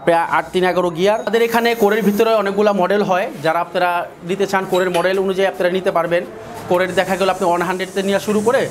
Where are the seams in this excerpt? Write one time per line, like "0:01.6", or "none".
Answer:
0:01.3